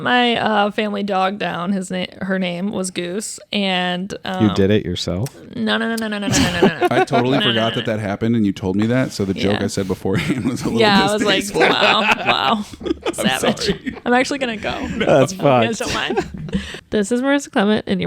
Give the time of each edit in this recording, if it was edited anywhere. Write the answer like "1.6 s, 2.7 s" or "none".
16.7 s

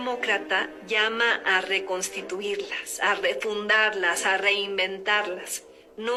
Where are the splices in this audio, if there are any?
none

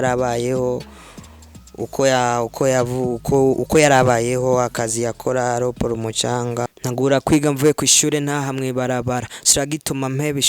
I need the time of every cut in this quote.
6.7 s

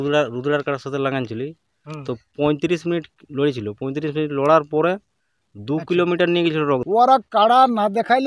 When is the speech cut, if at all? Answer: 6.8 s

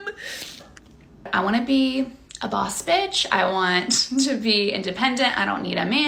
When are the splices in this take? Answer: 1.3 s

